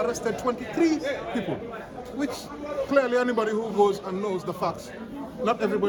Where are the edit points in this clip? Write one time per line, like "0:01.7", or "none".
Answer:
none